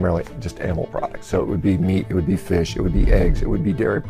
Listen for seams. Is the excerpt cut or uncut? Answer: uncut